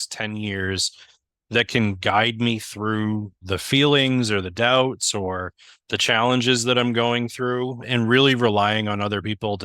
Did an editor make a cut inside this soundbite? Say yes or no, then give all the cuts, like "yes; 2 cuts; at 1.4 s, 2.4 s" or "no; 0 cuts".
yes; 2 cuts; at 3.4 s, 7.8 s